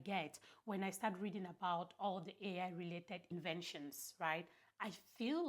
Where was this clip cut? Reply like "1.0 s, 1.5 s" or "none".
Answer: 3.3 s